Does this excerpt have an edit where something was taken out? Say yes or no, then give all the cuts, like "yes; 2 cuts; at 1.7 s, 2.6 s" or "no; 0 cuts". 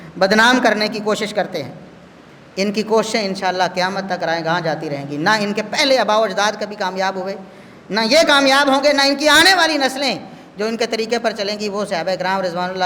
no; 0 cuts